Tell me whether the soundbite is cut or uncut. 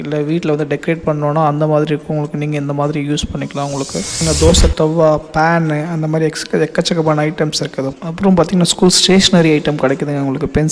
cut